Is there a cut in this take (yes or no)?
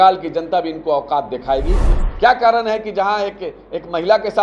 yes